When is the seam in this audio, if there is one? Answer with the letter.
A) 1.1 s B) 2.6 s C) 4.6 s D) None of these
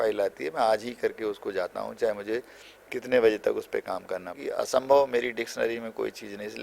C